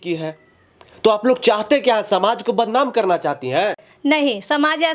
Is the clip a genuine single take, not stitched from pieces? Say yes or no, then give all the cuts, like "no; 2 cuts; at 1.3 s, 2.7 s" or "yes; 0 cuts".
yes; 0 cuts